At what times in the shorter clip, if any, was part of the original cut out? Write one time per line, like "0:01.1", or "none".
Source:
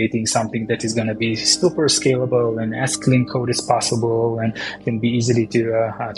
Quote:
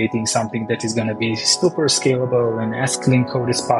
none